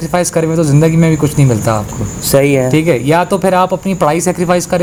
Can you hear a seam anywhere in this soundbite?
no; 0 cuts

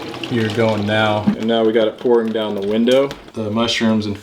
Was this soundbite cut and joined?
yes; 2 cuts; at 1.4 s, 3.3 s

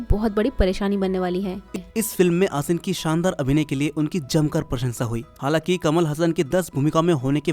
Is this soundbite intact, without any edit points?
no; 2 cuts; at 1.7 s, 5.3 s

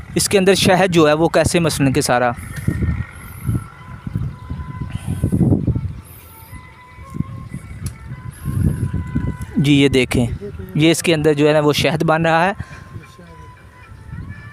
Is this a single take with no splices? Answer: yes; 0 cuts

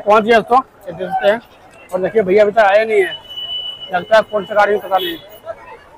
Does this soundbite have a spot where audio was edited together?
no; 0 cuts

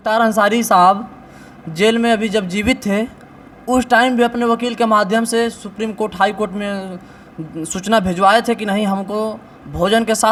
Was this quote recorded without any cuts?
yes; 0 cuts

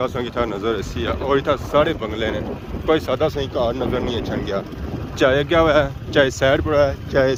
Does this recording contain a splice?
no; 0 cuts

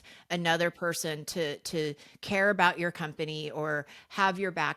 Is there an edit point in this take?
no; 0 cuts

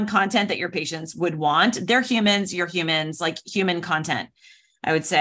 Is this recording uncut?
yes; 0 cuts

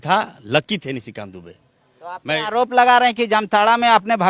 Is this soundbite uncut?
yes; 0 cuts

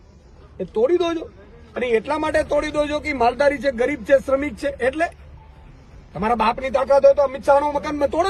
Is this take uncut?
yes; 0 cuts

